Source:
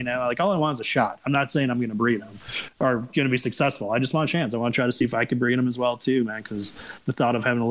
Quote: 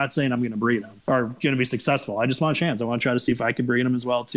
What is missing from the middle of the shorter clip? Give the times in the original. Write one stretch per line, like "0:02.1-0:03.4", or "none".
0:02.3-0:02.7